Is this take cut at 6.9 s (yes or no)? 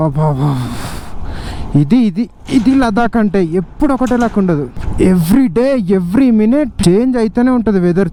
no